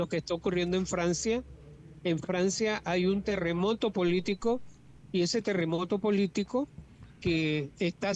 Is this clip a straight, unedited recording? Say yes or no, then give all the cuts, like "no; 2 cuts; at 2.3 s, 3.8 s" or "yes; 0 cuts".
yes; 0 cuts